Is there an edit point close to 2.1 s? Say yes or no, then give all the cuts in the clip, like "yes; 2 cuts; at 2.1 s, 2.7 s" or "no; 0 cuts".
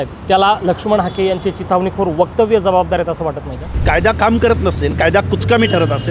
no; 1 cut; at 3.8 s